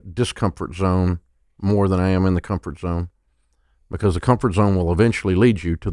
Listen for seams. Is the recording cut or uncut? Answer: uncut